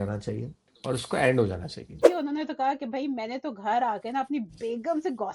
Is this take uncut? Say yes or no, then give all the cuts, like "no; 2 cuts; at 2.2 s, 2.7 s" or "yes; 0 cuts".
no; 1 cut; at 2.0 s